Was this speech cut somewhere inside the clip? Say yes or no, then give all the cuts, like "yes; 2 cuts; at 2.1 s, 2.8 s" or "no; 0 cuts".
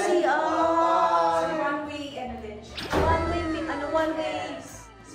no; 0 cuts